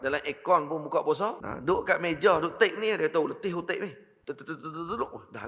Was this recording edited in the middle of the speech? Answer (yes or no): yes